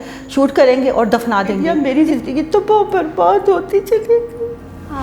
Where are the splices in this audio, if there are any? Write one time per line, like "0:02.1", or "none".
0:01.7